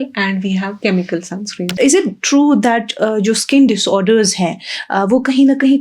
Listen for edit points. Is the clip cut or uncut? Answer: cut